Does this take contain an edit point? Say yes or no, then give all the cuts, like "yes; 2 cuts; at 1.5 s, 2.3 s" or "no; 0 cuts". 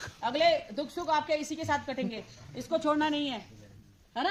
no; 0 cuts